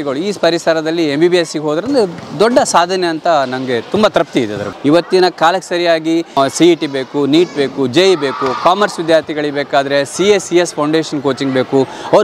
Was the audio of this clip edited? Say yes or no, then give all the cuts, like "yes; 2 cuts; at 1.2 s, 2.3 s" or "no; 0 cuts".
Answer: yes; 2 cuts; at 4.7 s, 6.4 s